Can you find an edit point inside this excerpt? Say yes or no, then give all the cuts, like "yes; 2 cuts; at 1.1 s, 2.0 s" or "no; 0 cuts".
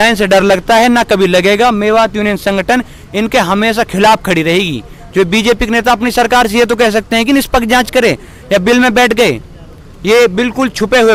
no; 0 cuts